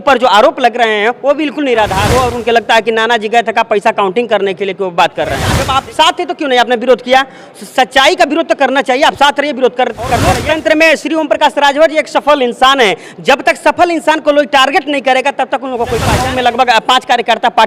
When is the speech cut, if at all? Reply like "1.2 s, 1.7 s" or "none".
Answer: 2.1 s, 5.6 s, 10.3 s, 16.1 s